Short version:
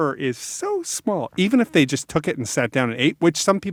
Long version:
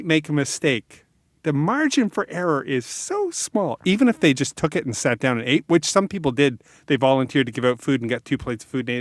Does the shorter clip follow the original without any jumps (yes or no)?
yes